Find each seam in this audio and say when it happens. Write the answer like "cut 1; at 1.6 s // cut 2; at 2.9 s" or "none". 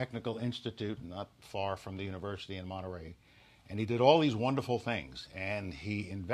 cut 1; at 1.8 s